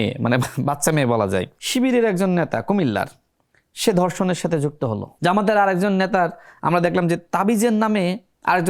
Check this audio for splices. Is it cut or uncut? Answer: cut